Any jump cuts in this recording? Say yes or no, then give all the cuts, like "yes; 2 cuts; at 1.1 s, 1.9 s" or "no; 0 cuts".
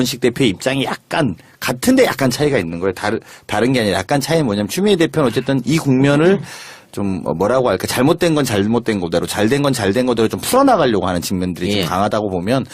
yes; 1 cut; at 11.3 s